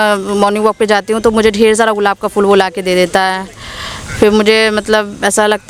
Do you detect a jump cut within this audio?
no; 0 cuts

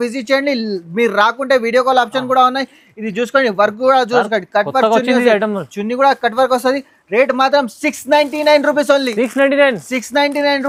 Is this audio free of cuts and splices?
yes; 0 cuts

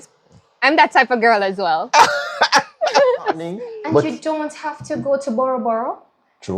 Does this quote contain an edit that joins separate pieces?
yes; 1 cut; at 3.7 s

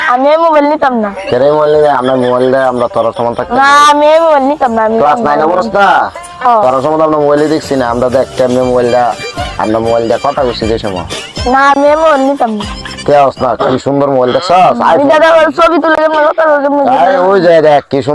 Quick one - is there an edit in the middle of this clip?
no; 0 cuts

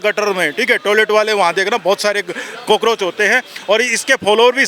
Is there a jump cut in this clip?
no; 0 cuts

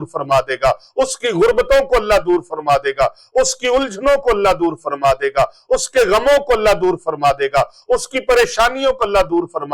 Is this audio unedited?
yes; 0 cuts

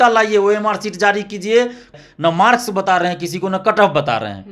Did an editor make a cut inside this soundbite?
yes; 1 cut; at 1.9 s

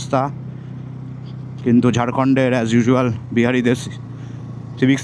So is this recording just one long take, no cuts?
yes; 0 cuts

